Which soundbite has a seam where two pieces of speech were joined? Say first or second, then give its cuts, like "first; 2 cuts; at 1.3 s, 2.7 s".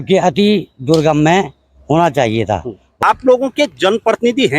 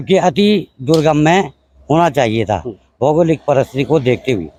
first; 1 cut; at 2.8 s